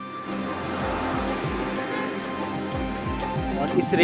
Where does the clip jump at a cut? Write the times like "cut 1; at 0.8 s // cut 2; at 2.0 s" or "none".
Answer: none